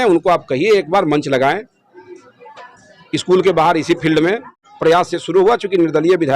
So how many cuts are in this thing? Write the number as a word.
one